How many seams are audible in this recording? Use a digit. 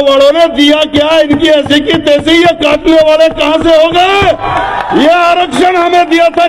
0